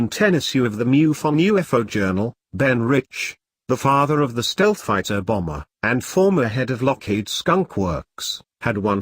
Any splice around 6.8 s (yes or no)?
yes